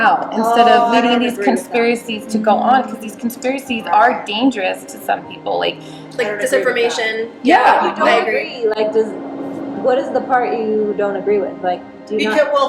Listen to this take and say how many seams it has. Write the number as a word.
zero